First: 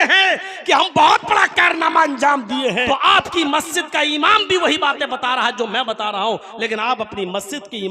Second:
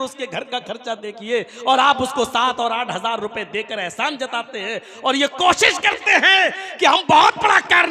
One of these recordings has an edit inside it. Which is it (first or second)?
first